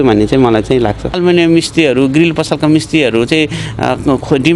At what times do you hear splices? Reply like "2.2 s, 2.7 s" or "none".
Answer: 1.1 s